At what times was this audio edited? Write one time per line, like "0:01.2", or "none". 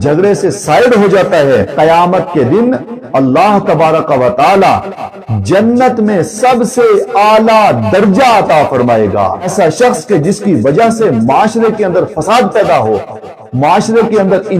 0:01.7
0:09.5